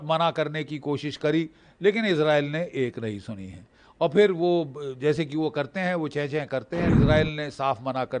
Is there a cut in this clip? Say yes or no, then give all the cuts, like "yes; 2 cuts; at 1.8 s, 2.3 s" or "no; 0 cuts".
yes; 1 cut; at 6.9 s